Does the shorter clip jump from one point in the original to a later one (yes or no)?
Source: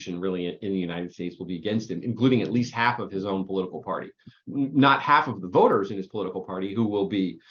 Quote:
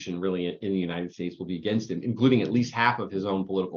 no